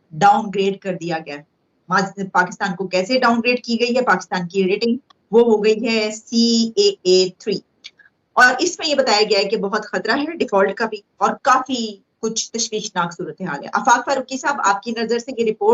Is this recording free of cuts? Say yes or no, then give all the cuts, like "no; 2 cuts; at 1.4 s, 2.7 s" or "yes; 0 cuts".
yes; 0 cuts